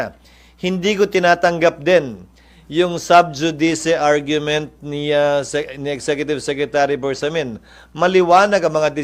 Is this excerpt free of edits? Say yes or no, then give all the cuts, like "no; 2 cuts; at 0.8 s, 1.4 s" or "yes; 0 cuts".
yes; 0 cuts